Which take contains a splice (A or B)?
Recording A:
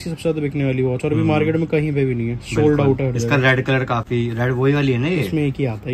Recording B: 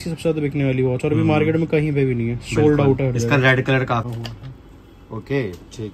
B